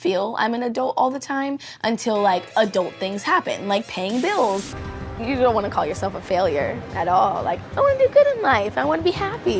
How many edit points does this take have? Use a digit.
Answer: 1